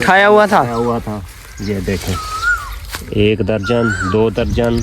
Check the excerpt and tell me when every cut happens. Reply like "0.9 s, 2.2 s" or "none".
none